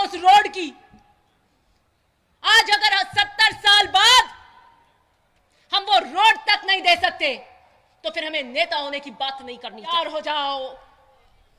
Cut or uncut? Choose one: cut